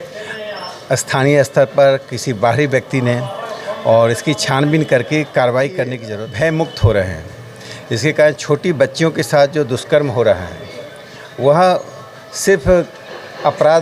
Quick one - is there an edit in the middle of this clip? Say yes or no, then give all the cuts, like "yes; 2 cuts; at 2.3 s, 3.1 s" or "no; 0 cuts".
yes; 1 cut; at 6.0 s